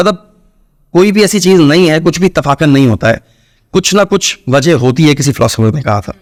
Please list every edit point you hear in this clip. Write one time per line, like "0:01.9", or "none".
none